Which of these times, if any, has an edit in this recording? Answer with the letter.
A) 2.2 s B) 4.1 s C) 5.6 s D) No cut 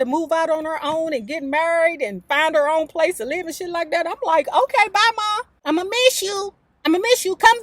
C